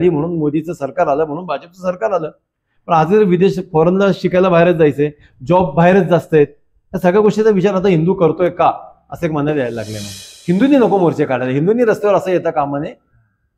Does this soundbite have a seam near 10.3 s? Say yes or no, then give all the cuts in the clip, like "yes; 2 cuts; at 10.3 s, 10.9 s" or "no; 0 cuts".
yes; 1 cut; at 10.3 s